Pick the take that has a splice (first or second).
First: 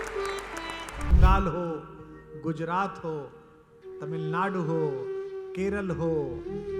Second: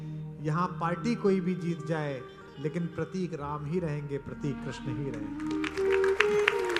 first